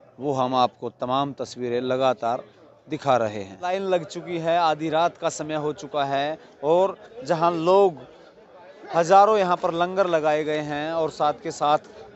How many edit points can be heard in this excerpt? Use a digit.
0